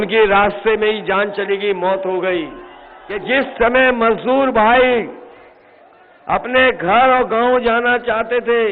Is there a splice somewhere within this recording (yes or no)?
yes